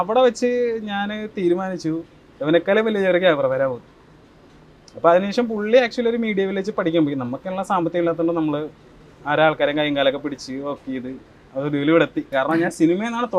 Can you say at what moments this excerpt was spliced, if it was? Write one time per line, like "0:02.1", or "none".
0:12.3

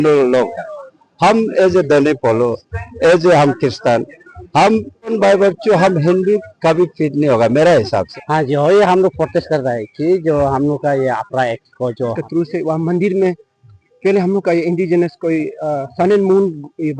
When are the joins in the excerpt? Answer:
0:05.1
0:08.1
0:12.2

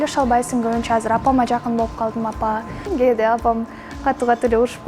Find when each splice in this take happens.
0:02.9

